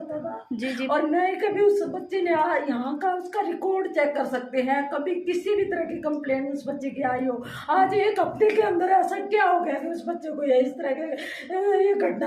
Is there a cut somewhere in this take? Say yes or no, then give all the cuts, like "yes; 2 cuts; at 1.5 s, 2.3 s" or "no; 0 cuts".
no; 0 cuts